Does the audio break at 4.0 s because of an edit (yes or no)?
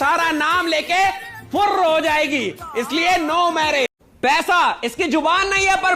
yes